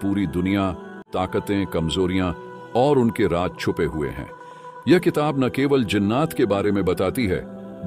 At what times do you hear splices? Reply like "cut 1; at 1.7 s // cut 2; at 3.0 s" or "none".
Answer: cut 1; at 1.1 s